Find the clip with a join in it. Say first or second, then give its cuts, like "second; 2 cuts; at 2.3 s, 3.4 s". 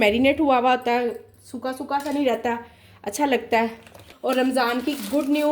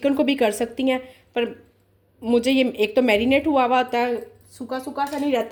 first; 1 cut; at 4.1 s